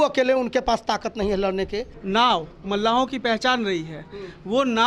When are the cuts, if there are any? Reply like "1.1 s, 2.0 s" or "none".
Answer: 1.9 s